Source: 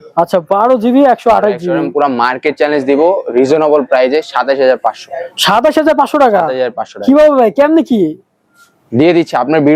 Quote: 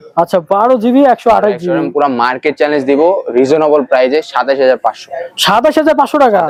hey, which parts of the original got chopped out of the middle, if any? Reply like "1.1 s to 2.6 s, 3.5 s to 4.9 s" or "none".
none